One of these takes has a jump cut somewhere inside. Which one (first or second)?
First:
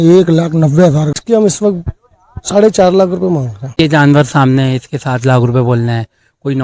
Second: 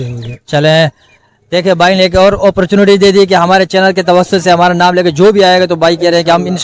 first